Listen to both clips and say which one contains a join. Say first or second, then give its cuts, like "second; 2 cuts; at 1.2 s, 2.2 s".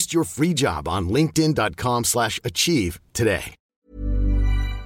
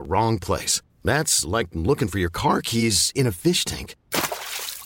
first; 1 cut; at 3.6 s